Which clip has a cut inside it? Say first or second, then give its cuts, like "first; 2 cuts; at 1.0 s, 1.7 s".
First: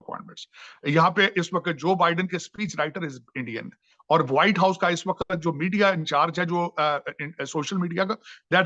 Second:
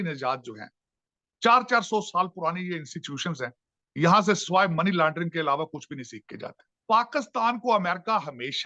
second; 1 cut; at 6.7 s